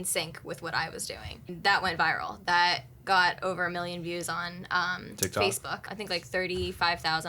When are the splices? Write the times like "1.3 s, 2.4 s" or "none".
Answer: 1.5 s, 5.9 s